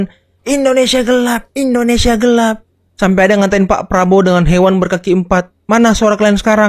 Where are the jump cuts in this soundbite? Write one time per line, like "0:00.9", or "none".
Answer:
none